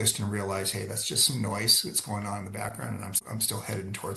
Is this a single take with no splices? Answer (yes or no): no